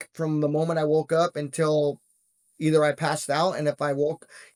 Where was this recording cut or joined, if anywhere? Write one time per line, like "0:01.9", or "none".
none